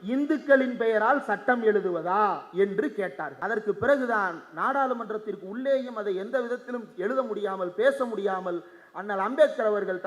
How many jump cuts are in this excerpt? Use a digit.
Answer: 1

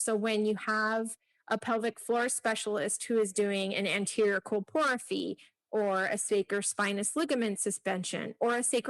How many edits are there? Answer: 0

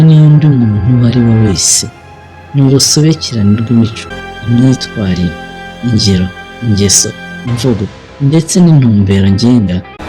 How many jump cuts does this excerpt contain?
0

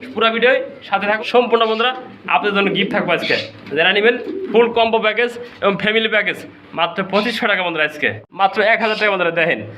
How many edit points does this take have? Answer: 2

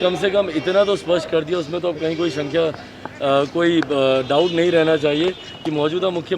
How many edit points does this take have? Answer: 0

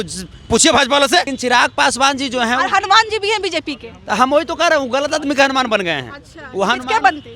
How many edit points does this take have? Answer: 1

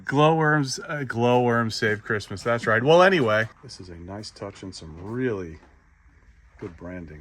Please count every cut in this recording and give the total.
1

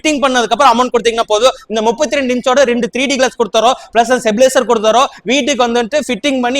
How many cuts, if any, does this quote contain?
0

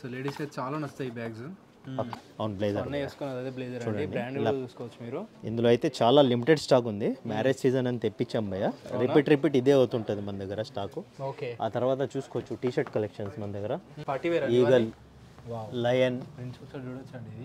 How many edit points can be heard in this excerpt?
2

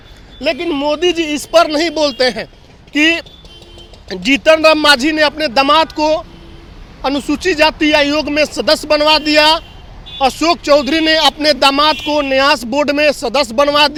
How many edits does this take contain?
0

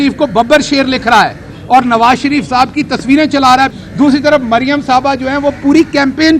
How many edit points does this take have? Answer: 1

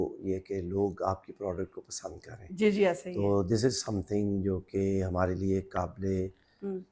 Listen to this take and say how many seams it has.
0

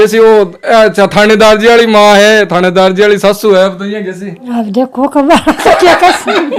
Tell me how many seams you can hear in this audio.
0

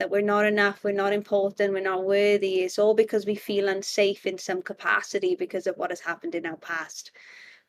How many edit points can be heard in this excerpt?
0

